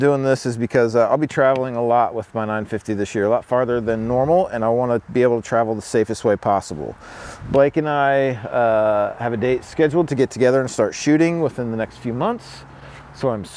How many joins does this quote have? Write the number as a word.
zero